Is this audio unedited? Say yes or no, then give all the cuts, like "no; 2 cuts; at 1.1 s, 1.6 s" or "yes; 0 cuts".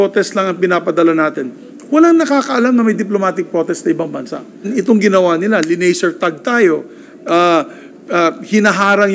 no; 1 cut; at 4.7 s